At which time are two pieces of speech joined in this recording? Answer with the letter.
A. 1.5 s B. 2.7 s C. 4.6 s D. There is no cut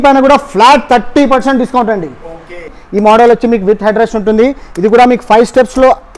B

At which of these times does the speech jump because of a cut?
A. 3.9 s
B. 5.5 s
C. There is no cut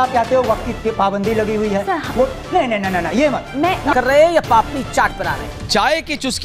A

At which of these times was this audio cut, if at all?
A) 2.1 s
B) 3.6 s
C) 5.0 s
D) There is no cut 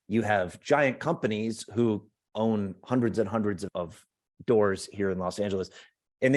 A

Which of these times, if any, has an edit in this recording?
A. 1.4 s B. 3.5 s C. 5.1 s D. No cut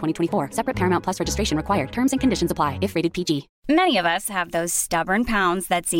B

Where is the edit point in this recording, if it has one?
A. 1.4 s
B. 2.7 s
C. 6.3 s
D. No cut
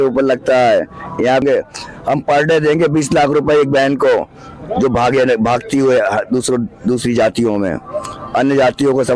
A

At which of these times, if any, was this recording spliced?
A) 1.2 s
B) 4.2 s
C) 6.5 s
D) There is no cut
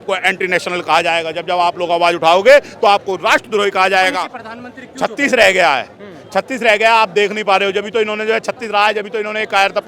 B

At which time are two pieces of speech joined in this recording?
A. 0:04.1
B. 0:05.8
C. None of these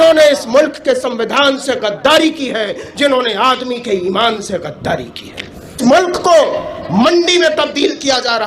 B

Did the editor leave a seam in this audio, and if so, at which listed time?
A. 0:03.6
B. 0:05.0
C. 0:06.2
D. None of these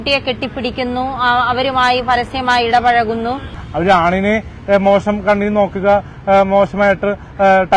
A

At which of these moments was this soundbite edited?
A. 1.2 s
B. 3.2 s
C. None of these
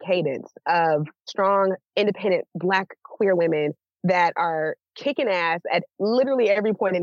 A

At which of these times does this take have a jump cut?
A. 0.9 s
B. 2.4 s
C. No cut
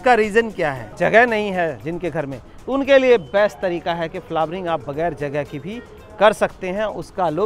A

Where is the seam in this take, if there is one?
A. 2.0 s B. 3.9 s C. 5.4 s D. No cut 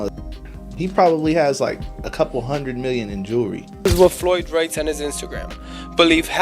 B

